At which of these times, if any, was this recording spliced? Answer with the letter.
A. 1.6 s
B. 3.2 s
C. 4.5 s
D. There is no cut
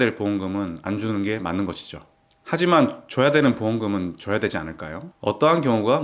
D